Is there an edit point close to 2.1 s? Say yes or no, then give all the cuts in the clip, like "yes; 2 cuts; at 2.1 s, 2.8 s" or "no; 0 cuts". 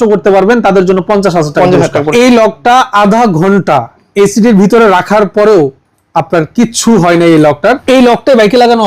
yes; 2 cuts; at 2.1 s, 7.8 s